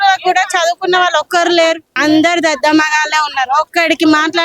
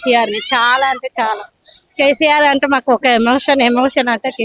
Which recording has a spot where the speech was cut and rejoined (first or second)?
first